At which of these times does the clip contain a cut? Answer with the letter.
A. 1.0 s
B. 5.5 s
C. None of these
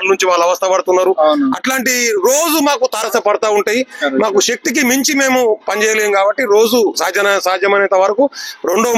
C